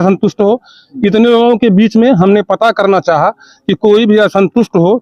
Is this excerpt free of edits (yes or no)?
yes